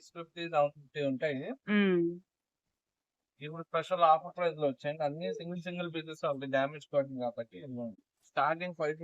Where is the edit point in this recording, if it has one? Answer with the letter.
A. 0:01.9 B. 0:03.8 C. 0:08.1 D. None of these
C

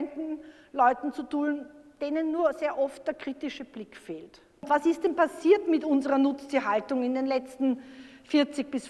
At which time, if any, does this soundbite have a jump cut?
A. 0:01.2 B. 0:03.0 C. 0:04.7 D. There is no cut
C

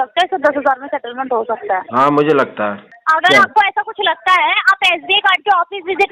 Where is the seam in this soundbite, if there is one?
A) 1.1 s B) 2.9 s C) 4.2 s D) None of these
B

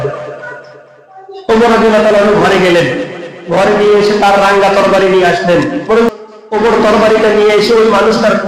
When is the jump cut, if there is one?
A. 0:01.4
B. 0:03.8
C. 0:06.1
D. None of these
C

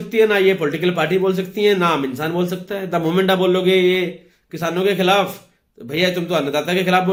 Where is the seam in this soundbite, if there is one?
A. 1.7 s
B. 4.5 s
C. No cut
C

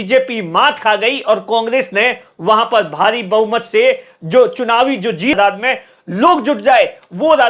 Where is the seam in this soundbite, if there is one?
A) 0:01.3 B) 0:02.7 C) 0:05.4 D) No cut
C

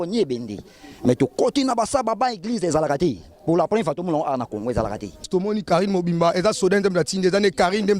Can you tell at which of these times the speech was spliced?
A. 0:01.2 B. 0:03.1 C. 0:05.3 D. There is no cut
C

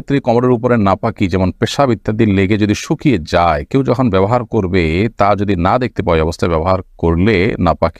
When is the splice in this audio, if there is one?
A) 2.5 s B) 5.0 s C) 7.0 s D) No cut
D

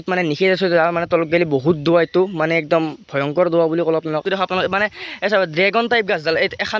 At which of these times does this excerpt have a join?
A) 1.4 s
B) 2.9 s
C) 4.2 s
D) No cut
C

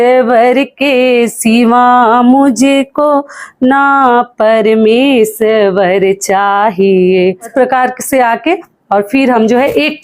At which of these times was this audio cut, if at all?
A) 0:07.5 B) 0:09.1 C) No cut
A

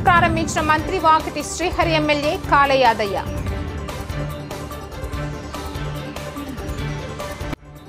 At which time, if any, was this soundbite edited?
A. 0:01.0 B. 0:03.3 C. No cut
B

